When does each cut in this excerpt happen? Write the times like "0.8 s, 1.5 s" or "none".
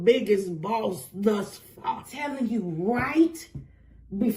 2.1 s